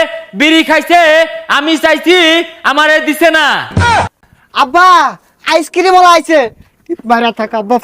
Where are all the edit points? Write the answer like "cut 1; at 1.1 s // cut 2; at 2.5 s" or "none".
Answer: cut 1; at 3.9 s